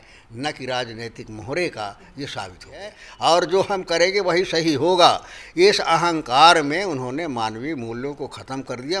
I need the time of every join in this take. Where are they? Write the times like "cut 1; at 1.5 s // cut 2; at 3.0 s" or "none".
cut 1; at 3.0 s